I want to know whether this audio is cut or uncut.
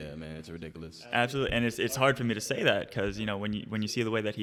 uncut